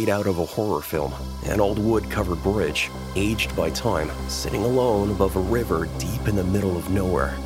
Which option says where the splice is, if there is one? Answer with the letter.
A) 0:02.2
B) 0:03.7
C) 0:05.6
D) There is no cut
D